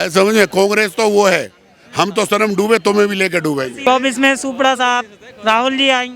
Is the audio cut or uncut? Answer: cut